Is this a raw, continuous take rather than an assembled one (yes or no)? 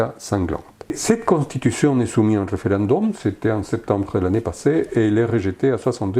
no